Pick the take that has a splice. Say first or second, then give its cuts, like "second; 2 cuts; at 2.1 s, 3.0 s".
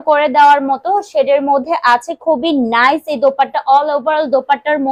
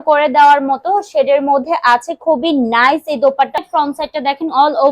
second; 1 cut; at 3.6 s